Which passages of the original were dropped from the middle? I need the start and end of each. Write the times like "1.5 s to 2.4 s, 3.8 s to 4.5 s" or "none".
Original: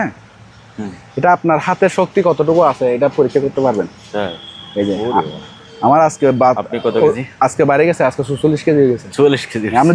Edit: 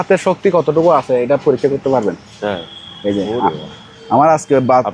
none